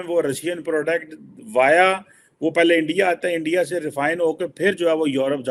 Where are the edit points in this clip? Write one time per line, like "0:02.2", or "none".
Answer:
none